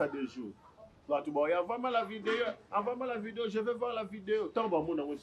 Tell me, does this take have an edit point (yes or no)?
no